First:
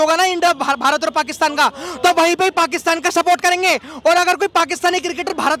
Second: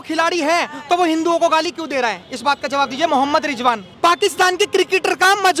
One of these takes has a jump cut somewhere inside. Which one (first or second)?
second